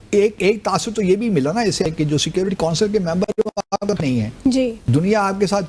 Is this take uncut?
no; 1 cut; at 1.9 s

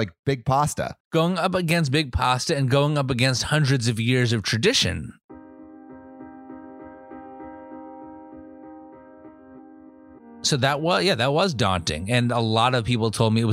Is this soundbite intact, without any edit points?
no; 1 cut; at 0.9 s

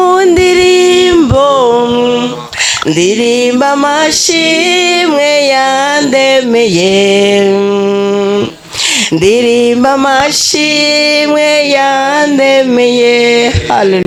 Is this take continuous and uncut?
yes; 0 cuts

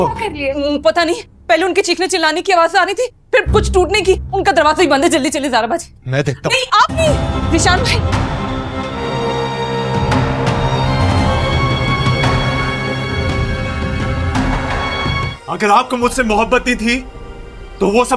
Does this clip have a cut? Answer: yes; 2 cuts; at 9.0 s, 15.3 s

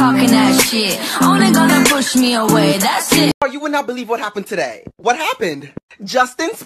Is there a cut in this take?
yes; 1 cut; at 3.4 s

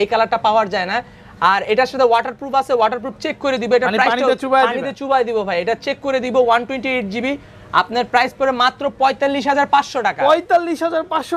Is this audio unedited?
yes; 0 cuts

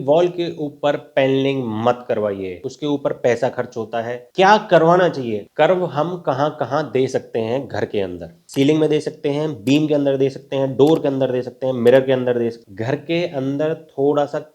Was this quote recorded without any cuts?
no; 3 cuts; at 2.5 s, 5.4 s, 12.6 s

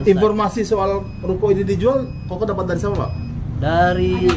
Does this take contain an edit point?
no; 0 cuts

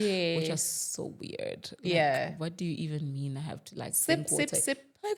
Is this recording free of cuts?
yes; 0 cuts

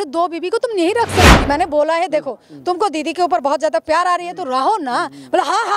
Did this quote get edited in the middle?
yes; 1 cut; at 1.4 s

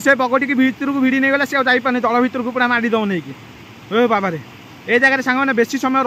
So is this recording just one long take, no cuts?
yes; 0 cuts

